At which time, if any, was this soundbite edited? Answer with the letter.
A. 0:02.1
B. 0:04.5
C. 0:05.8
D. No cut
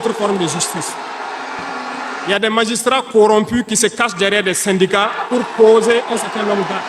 A